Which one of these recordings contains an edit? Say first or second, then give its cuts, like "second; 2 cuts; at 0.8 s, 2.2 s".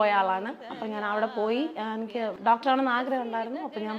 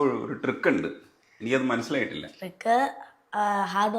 first; 1 cut; at 2.4 s